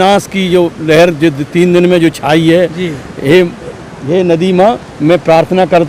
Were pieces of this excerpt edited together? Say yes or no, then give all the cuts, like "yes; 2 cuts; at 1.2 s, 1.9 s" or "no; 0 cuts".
no; 0 cuts